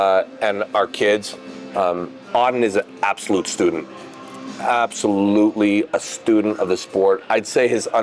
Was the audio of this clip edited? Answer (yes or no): no